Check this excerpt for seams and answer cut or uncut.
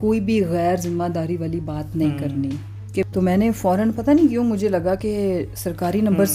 cut